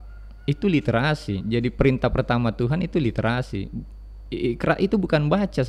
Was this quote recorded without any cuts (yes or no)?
yes